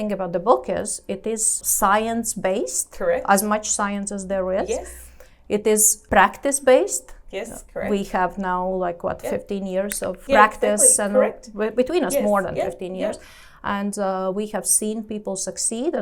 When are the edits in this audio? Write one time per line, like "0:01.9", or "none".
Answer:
0:01.5
0:05.9
0:10.2